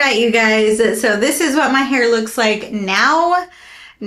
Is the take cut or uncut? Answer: uncut